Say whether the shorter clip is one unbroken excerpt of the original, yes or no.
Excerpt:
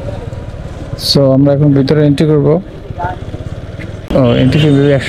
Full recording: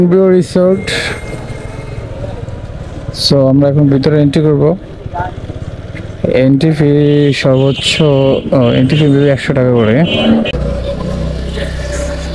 no